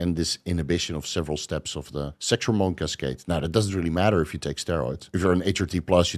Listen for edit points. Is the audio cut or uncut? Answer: cut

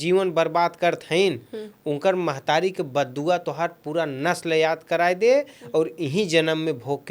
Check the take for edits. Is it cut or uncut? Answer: uncut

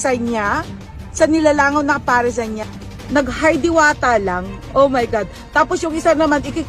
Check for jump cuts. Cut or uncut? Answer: cut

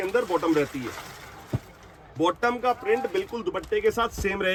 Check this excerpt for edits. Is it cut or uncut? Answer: uncut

